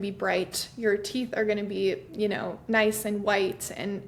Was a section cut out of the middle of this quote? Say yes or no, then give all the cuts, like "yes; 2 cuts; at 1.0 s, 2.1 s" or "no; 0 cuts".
no; 0 cuts